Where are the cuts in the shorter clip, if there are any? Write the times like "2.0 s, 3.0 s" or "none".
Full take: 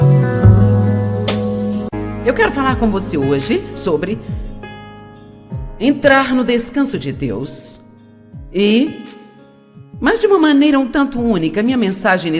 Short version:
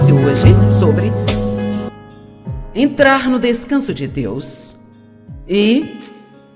1.9 s